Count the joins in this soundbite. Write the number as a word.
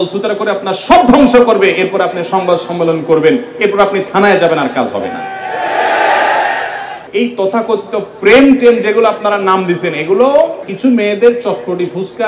two